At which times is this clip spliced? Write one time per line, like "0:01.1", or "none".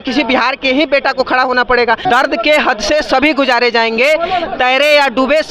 0:02.0